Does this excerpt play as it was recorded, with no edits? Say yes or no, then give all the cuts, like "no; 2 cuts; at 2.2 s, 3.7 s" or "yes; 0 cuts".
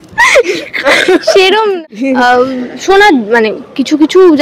no; 1 cut; at 1.7 s